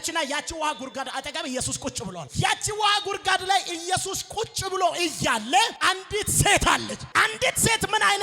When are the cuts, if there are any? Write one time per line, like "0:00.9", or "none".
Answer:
0:07.0